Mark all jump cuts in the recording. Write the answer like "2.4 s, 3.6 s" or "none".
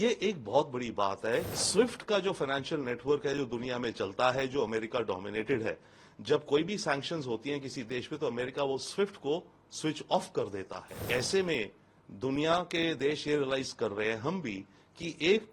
1.5 s, 11.0 s